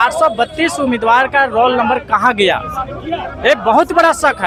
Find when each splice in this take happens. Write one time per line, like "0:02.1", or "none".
none